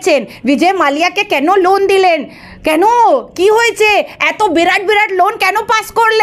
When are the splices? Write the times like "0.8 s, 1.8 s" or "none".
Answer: none